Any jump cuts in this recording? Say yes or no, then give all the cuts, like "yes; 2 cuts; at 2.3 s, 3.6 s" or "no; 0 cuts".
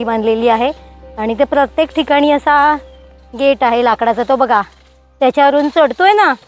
no; 0 cuts